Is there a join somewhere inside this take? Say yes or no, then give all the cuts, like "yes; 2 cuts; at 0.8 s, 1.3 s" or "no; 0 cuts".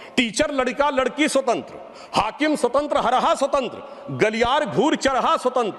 no; 0 cuts